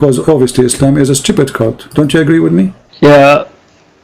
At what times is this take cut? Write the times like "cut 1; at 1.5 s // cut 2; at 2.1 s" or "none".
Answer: cut 1; at 2.8 s